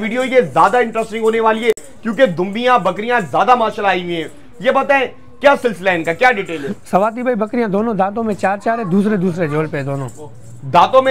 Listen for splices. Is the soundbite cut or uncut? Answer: uncut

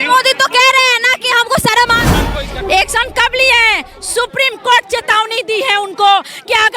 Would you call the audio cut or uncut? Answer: cut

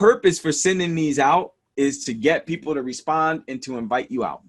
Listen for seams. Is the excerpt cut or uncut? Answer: cut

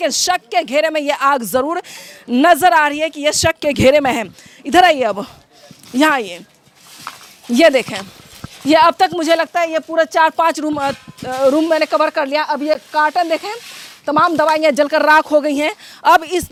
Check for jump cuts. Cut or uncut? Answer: uncut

